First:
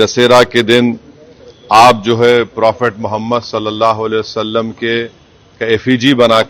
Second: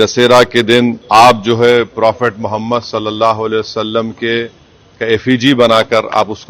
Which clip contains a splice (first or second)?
second